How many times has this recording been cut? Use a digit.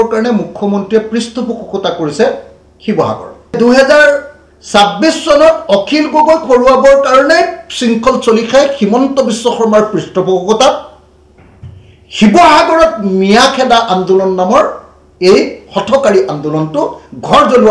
1